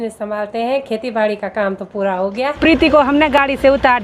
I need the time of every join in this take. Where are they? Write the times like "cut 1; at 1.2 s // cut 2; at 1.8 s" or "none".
cut 1; at 2.6 s